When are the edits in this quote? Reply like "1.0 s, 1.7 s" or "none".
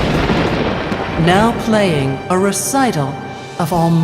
none